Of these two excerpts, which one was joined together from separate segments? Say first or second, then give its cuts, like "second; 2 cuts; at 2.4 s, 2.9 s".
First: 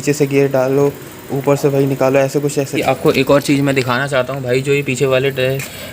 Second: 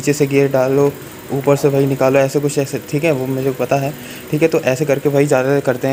first; 1 cut; at 2.8 s